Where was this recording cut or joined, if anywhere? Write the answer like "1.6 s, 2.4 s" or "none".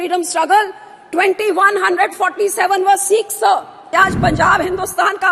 3.8 s

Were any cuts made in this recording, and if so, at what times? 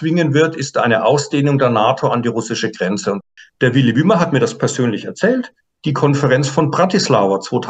3.2 s

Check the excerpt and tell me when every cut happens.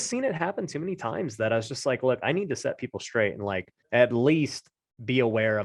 3.7 s

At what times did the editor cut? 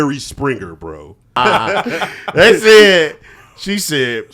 1.4 s

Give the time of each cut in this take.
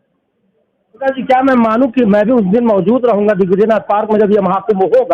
1.1 s

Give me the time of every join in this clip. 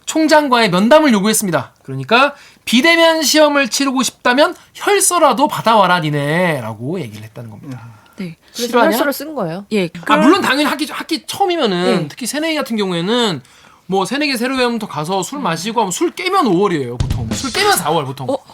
10.0 s

